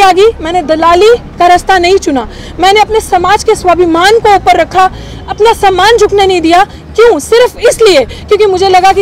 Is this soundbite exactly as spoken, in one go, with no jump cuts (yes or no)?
yes